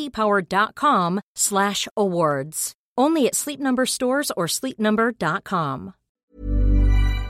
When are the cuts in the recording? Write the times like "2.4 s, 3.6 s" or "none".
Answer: 6.2 s